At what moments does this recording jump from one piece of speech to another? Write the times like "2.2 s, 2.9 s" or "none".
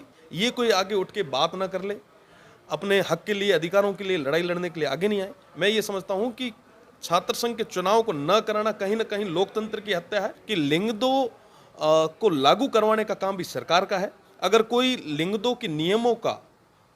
10.4 s